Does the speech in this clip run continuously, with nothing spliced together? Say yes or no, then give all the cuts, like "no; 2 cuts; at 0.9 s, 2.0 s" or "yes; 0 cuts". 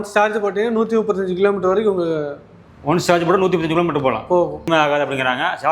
no; 1 cut; at 4.7 s